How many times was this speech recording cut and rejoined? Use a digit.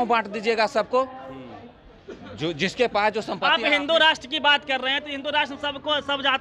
0